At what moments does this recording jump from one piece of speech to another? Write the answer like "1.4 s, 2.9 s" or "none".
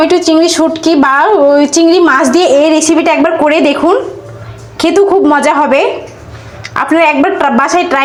none